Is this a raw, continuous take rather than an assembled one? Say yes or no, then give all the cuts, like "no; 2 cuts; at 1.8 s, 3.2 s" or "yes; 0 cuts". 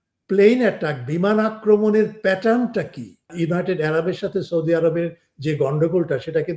no; 1 cut; at 3.3 s